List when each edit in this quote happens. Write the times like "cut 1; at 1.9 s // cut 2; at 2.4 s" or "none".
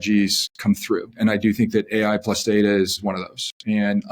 cut 1; at 1.1 s // cut 2; at 3.0 s